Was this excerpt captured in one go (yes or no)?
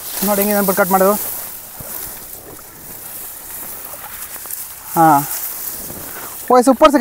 yes